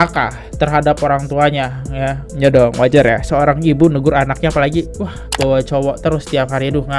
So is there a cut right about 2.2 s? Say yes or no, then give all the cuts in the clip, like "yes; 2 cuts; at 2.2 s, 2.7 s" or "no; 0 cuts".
yes; 1 cut; at 2.2 s